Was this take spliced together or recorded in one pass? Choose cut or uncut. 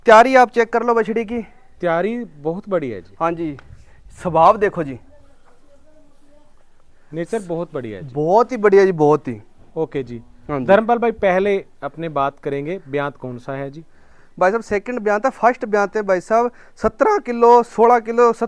uncut